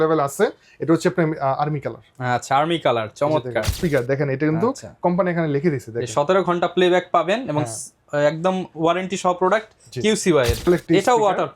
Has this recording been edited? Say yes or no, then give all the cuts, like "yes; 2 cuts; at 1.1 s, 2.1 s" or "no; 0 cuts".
yes; 2 cuts; at 3.7 s, 10.6 s